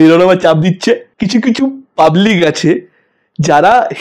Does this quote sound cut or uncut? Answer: cut